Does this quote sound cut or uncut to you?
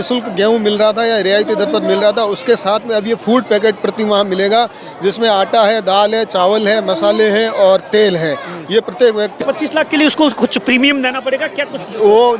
cut